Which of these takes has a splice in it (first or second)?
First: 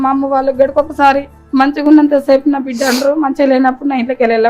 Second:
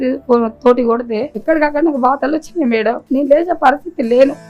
second